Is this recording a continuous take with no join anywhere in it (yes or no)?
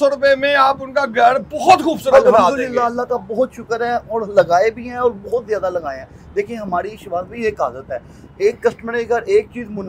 yes